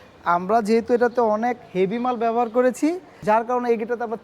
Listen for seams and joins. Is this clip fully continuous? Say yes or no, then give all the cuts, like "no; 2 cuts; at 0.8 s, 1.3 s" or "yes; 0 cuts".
no; 1 cut; at 3.1 s